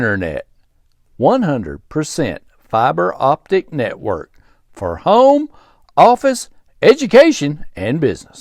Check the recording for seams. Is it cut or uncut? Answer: uncut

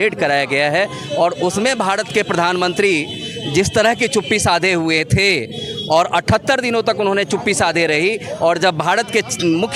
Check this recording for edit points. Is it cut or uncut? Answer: uncut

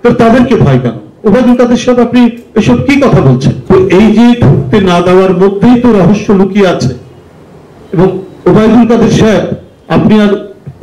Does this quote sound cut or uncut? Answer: cut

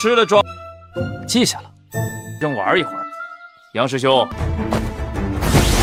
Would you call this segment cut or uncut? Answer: uncut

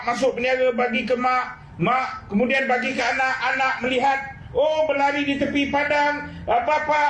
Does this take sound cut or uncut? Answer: uncut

